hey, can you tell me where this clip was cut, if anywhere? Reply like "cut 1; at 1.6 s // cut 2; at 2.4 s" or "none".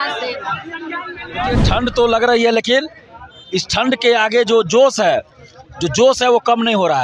cut 1; at 1.6 s